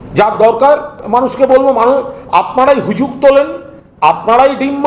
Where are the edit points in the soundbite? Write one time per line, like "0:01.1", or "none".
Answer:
0:01.3